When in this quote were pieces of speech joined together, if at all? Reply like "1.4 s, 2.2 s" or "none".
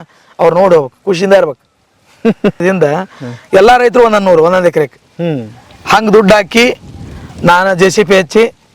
2.6 s